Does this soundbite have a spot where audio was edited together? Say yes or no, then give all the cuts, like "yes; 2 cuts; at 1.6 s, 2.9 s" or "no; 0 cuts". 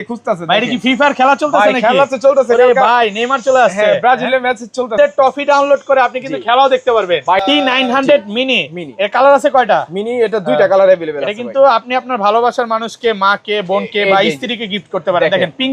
yes; 2 cuts; at 4.9 s, 7.4 s